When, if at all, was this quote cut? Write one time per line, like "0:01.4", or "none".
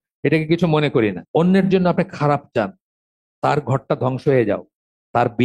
0:01.2